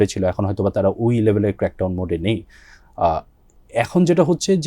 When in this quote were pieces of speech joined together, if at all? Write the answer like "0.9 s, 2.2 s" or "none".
none